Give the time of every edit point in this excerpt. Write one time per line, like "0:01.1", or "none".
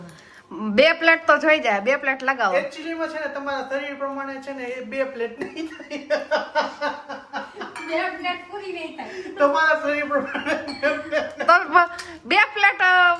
none